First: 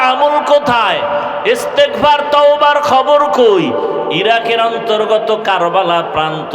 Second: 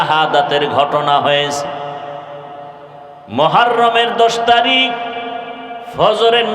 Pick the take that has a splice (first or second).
first